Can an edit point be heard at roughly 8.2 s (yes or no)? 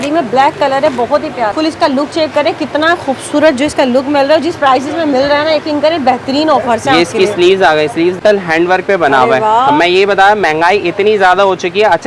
yes